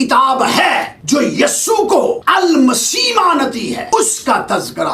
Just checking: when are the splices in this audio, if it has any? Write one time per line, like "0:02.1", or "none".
0:00.9
0:02.2
0:03.9